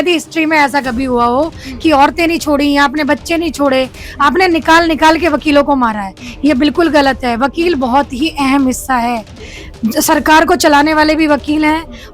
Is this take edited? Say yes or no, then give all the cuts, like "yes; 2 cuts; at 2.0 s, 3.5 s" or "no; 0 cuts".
no; 0 cuts